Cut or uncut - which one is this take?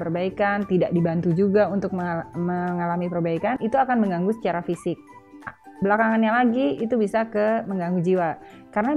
cut